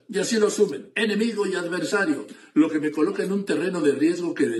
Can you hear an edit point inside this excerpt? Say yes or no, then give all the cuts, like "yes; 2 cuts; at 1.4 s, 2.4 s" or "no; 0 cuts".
no; 0 cuts